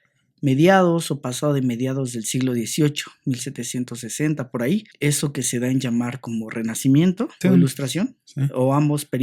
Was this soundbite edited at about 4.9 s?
no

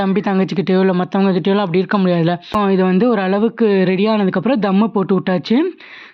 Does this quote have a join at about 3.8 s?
no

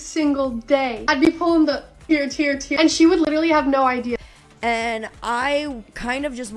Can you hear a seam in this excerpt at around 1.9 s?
no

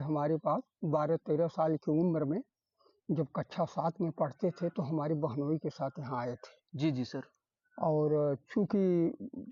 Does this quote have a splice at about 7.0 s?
no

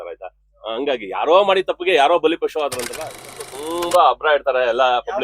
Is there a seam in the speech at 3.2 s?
yes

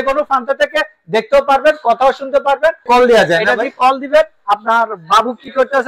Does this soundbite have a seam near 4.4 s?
no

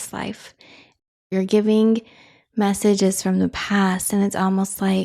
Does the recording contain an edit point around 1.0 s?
yes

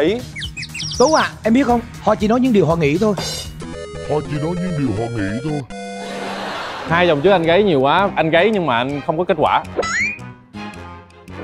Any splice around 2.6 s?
no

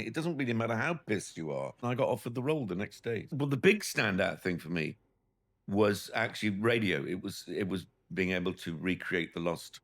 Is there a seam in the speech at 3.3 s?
yes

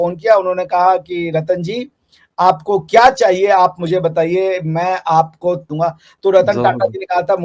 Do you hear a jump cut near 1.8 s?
no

